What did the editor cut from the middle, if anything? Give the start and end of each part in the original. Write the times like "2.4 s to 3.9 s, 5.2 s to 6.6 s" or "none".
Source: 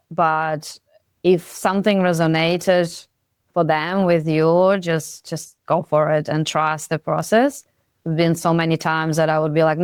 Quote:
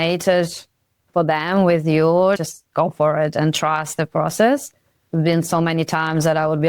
4.8 s to 5.3 s